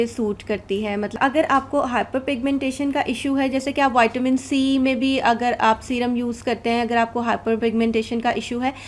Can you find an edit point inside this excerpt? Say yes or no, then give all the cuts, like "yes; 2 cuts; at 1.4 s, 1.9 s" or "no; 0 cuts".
yes; 1 cut; at 1.2 s